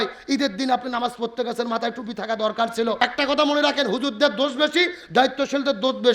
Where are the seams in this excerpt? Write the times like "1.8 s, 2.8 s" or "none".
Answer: 3.0 s